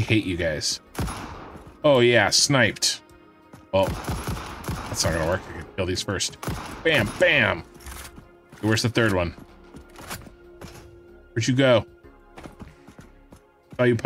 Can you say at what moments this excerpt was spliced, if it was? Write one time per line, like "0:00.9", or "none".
none